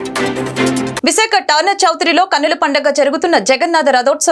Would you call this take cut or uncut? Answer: cut